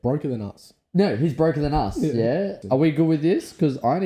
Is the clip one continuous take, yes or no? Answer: no